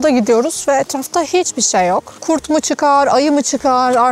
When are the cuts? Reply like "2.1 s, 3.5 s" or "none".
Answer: none